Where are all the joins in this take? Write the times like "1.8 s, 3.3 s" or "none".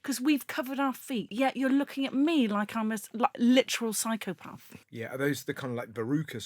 1.3 s, 4.8 s